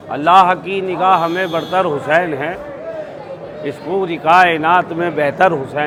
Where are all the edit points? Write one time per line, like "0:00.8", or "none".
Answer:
none